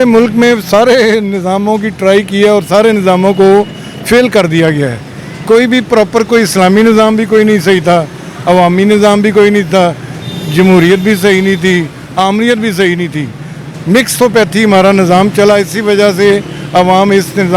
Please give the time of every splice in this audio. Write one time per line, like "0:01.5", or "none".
none